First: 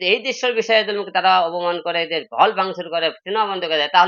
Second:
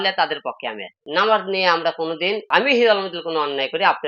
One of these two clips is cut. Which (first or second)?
second